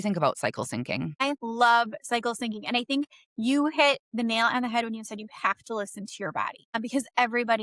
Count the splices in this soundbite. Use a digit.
2